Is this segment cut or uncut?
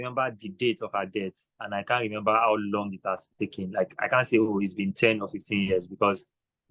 uncut